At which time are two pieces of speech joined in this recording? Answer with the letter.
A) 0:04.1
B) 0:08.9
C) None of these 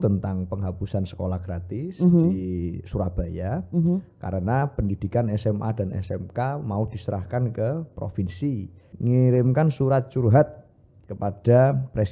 B